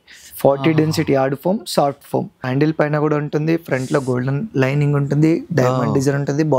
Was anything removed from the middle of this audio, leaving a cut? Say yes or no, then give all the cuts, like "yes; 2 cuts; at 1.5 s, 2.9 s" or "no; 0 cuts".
yes; 1 cut; at 2.5 s